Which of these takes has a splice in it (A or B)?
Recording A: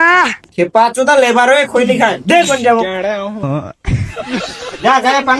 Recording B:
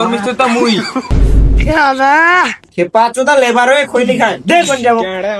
B